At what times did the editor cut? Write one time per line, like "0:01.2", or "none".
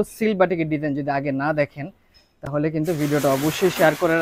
none